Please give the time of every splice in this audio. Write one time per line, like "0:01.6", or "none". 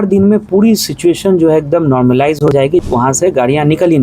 0:02.8